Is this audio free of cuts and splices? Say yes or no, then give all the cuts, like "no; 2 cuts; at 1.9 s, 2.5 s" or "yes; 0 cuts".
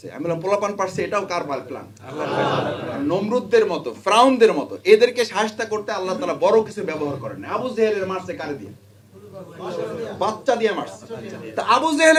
yes; 0 cuts